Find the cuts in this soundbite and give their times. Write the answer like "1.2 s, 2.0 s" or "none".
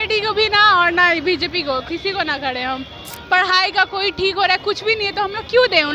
3.2 s